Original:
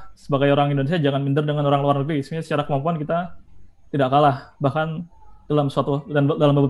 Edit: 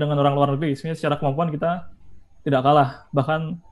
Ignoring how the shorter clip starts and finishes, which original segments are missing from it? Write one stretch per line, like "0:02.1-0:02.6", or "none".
none